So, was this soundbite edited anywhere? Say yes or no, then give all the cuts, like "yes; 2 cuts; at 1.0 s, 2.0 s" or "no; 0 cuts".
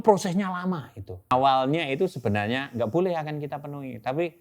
yes; 1 cut; at 1.3 s